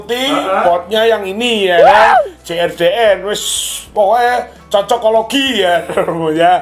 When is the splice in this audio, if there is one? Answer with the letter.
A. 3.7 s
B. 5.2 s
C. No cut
C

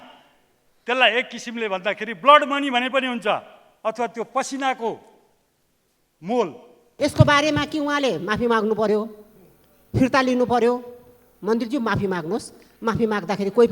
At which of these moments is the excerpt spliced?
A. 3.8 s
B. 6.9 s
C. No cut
B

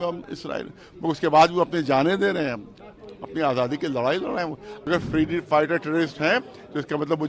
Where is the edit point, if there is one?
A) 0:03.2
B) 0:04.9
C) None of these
B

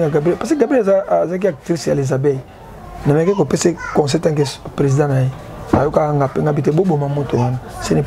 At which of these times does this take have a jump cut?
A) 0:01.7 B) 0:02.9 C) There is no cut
C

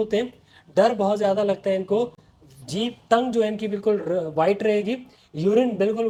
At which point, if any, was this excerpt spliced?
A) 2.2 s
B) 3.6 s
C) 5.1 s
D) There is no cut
D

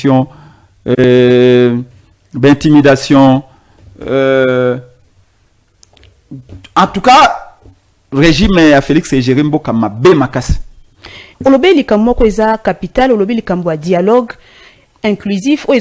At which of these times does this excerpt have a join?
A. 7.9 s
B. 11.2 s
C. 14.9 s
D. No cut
B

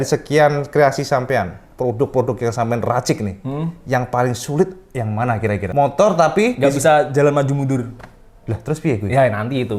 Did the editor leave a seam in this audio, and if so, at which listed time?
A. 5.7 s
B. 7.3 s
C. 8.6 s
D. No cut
A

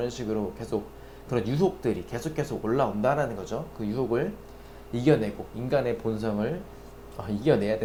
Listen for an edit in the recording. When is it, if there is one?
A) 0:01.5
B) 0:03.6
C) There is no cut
C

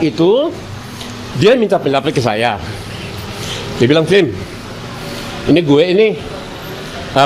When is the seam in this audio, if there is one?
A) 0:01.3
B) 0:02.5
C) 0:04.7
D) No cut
D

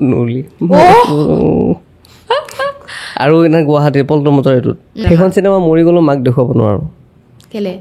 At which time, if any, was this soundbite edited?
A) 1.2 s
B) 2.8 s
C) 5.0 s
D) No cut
C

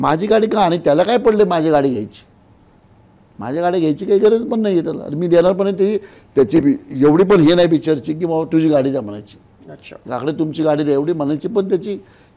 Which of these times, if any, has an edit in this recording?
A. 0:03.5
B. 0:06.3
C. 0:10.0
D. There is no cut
D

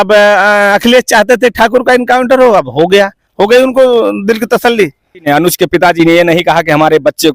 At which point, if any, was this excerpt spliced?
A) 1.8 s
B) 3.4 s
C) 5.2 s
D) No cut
C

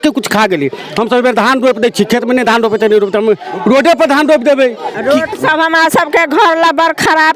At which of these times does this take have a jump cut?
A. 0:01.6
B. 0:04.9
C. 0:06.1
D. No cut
B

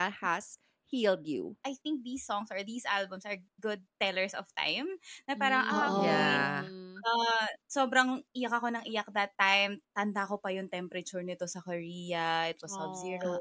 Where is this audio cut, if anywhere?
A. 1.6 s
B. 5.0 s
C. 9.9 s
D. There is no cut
A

